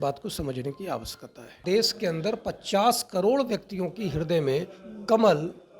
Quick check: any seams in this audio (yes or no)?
yes